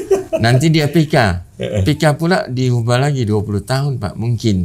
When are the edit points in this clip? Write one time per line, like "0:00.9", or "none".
none